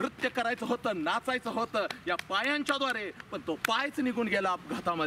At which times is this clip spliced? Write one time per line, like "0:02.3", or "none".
0:03.0